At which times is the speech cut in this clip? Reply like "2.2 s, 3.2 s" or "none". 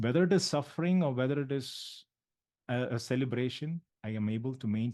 3.9 s